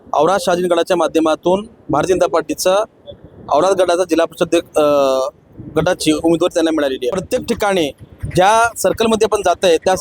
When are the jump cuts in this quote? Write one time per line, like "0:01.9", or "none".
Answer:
0:07.1

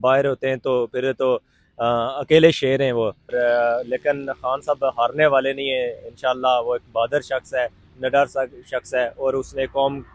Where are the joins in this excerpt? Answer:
0:03.3

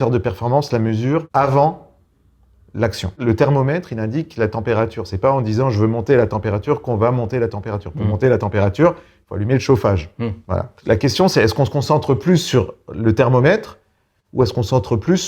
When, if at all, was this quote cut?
0:01.3
0:03.2
0:10.8

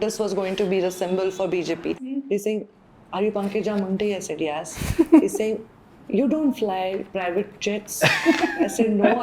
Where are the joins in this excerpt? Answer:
0:02.2

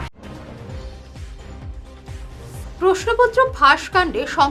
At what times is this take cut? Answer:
0:01.6

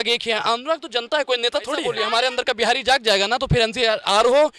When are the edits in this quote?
0:01.9

